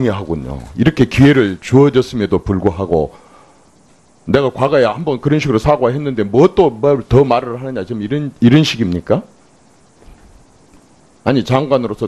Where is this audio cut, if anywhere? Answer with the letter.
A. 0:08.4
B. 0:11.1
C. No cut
B